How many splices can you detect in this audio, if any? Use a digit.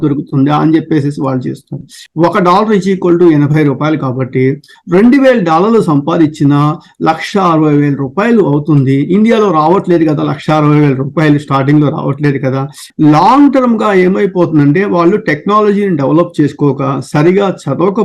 2